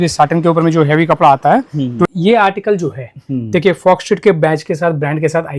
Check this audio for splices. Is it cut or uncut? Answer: cut